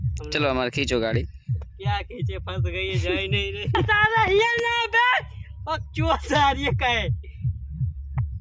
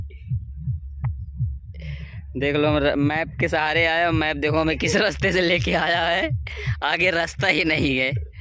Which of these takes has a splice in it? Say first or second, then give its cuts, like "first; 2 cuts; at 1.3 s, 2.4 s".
first; 1 cut; at 3.8 s